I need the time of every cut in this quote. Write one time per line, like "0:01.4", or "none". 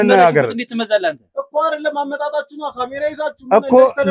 none